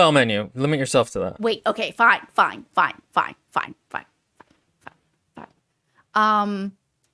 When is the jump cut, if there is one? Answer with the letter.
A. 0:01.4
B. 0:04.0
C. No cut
A